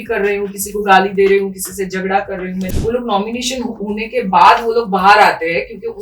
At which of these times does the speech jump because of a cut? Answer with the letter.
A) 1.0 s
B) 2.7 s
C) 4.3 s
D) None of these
B